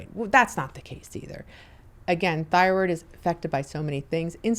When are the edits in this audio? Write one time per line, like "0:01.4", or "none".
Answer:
none